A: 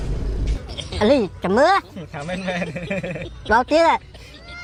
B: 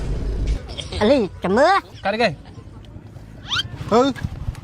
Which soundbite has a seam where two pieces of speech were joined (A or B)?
B